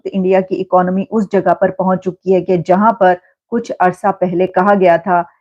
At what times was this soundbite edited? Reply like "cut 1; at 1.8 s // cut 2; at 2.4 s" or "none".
none